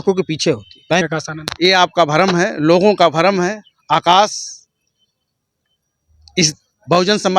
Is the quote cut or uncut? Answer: cut